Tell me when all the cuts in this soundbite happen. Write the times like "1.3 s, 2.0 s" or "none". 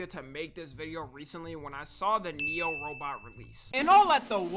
3.6 s